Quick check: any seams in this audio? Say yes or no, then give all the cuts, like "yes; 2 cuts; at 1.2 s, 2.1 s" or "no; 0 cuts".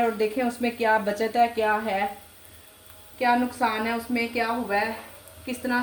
no; 0 cuts